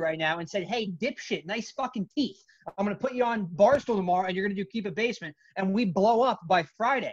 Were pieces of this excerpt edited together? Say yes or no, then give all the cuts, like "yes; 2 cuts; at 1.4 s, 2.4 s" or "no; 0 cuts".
no; 0 cuts